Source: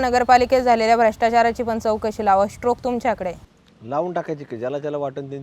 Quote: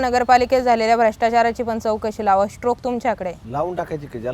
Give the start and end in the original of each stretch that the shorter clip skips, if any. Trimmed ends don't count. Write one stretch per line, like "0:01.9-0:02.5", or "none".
0:03.4-0:03.8